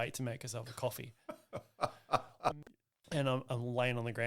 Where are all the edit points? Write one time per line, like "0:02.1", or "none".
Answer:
0:02.5